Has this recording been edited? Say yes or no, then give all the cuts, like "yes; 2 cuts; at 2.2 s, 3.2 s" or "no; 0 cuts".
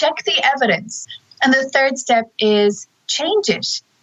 yes; 1 cut; at 0.9 s